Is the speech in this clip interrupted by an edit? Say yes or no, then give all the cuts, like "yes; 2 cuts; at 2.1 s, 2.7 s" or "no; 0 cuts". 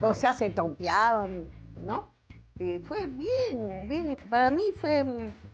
no; 0 cuts